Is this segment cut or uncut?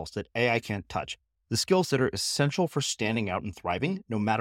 uncut